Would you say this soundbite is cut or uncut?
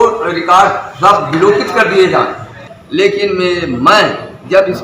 cut